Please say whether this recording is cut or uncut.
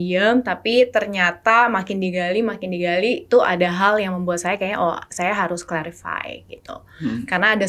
uncut